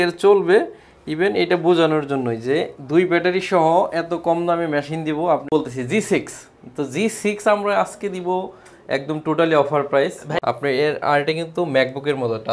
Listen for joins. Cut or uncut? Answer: cut